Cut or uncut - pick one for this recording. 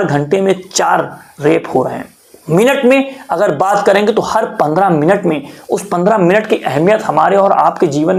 uncut